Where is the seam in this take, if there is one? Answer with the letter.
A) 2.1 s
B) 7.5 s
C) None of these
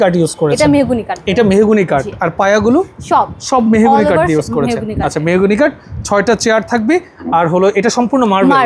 C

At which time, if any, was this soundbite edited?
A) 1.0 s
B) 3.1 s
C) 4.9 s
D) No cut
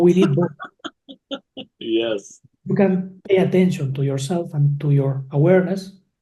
B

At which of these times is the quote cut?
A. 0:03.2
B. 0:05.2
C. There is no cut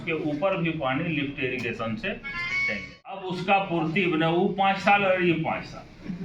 A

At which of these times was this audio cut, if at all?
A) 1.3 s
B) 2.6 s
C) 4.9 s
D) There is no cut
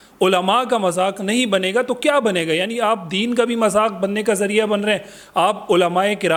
D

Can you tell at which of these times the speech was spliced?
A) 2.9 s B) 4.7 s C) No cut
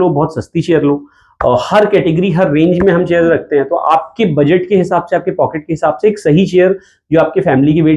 C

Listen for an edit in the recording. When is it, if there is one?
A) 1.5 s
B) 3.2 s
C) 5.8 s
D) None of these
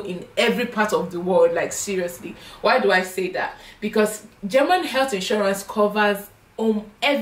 D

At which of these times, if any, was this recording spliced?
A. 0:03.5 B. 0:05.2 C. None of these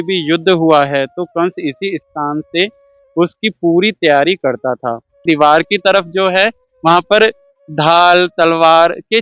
B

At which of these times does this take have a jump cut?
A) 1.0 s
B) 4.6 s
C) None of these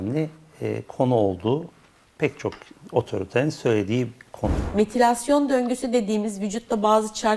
B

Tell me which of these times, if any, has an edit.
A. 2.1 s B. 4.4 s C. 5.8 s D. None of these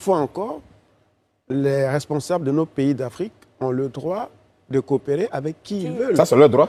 D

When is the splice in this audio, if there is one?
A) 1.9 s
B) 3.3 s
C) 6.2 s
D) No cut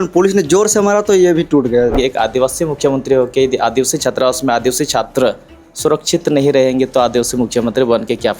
A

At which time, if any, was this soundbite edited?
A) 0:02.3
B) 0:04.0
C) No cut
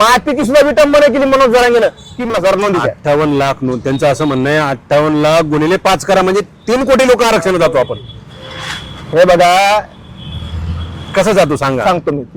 A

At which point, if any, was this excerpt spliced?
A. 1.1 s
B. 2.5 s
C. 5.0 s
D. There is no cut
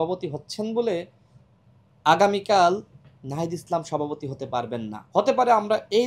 C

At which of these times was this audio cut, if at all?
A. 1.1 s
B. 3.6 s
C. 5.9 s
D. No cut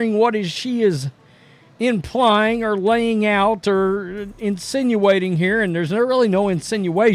D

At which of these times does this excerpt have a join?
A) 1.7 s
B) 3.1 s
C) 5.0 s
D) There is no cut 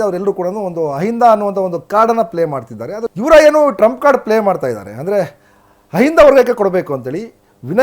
B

